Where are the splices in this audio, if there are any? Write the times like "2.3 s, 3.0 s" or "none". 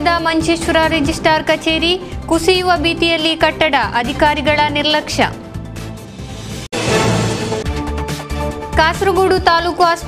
none